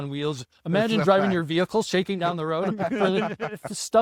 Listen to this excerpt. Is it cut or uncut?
uncut